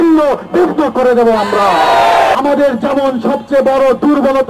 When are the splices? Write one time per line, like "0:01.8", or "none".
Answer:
0:02.4